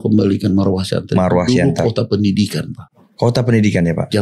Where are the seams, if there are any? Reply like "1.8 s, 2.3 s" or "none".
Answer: none